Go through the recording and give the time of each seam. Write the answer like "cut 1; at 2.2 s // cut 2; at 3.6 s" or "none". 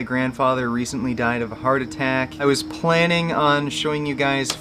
cut 1; at 2.4 s